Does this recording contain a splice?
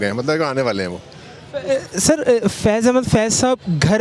no; 0 cuts

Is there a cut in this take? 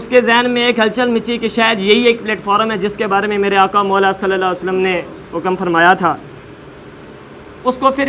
no; 0 cuts

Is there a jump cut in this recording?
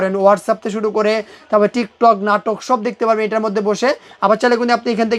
no; 0 cuts

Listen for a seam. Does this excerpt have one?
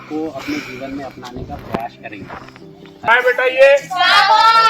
yes; 1 cut; at 3.1 s

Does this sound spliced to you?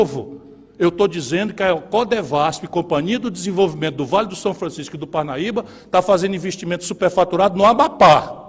no; 0 cuts

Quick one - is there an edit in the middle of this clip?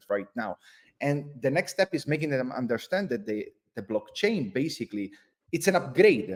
no; 0 cuts

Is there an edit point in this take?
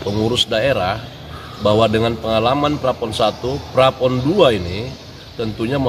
no; 0 cuts

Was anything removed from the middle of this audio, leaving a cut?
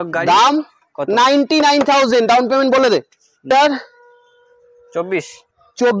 yes; 1 cut; at 3.5 s

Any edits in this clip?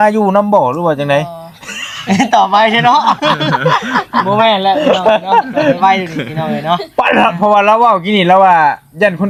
no; 0 cuts

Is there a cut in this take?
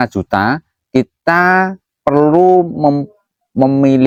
no; 0 cuts

